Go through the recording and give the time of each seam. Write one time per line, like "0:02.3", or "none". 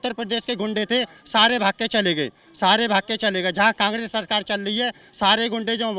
none